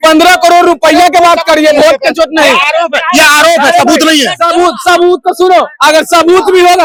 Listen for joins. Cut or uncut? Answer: uncut